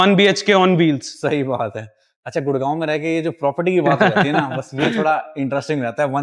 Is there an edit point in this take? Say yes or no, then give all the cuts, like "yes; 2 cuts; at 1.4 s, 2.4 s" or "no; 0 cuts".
no; 0 cuts